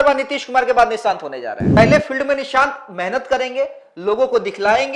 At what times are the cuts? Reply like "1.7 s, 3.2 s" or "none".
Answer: 1.6 s

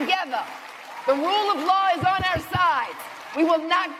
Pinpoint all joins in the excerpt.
none

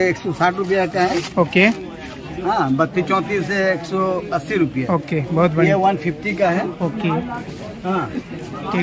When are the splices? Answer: none

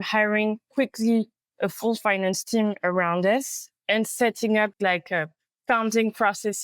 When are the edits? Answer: 4.7 s

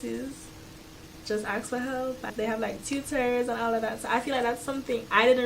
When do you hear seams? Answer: 2.3 s

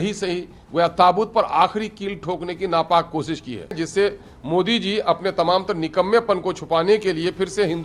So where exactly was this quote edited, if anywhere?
3.8 s

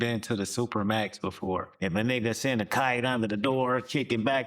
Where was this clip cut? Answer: 1.7 s

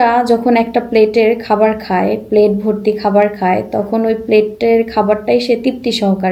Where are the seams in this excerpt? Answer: none

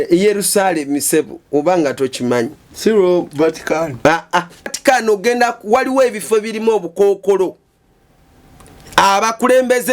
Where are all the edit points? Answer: 4.6 s

